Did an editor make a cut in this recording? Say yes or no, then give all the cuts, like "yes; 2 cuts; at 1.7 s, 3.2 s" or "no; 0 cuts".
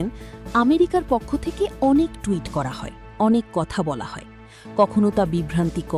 no; 0 cuts